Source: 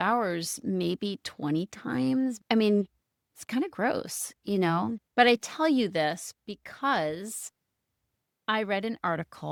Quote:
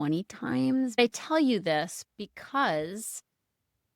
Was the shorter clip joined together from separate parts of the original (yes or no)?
yes